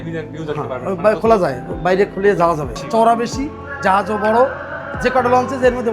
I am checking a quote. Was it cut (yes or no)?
yes